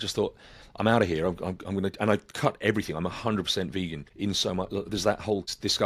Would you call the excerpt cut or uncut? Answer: uncut